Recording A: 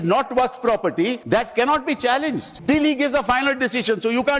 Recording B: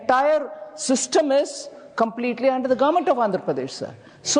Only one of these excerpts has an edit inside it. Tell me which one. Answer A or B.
A